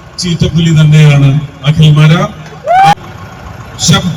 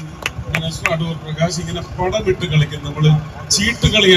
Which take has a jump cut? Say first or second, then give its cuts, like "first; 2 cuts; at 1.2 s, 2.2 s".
first; 1 cut; at 2.9 s